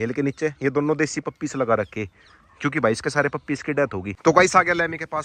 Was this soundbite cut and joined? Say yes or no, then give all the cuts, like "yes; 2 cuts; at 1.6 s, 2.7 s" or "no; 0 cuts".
yes; 1 cut; at 4.2 s